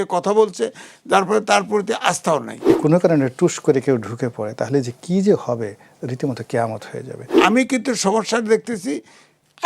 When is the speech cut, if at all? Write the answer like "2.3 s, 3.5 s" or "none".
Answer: 2.7 s, 7.3 s